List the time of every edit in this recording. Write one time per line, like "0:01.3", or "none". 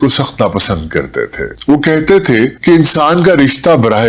0:01.5
0:02.6